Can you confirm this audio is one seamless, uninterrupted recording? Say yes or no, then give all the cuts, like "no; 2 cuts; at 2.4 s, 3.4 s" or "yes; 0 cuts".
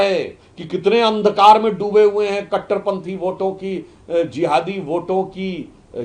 yes; 0 cuts